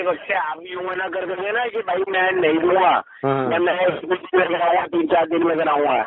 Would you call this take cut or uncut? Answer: uncut